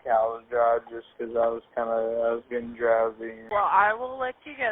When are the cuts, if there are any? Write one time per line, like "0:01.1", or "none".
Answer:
0:03.4